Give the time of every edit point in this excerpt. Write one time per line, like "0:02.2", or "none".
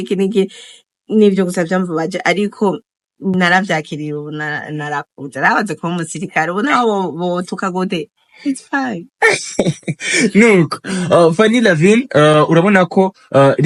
none

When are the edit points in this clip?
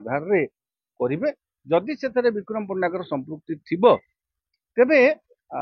none

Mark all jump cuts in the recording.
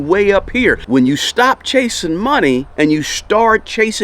0:00.8
0:02.7

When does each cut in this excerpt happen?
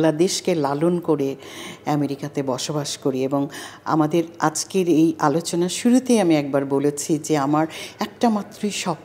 none

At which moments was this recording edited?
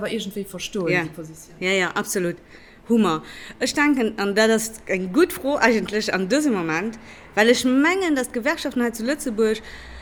none

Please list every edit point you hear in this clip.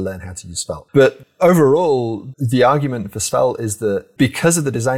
0:01.2
0:02.2
0:04.1

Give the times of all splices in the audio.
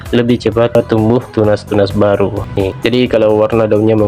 0:02.6

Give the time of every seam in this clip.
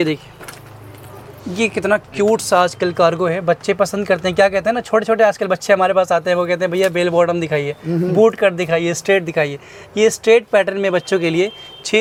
none

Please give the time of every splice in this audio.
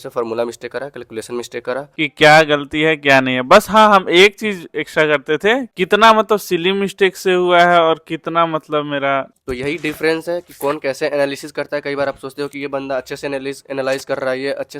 0:02.0
0:05.7
0:09.3

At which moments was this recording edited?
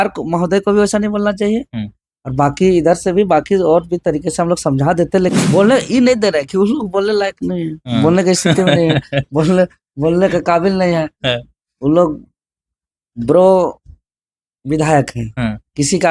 0:05.3

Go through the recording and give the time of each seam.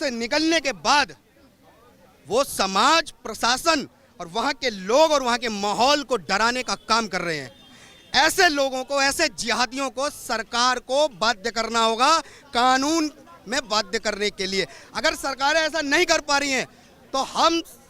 none

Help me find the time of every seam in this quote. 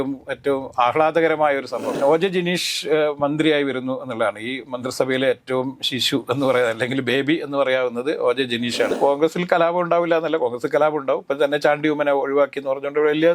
0:01.9
0:08.9

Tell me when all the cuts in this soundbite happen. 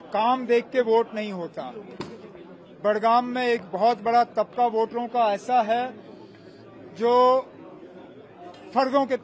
none

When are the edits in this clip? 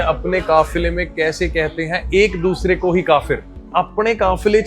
none

